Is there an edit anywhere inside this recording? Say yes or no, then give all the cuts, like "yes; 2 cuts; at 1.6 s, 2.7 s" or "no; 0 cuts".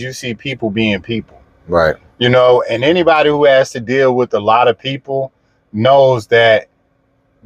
no; 0 cuts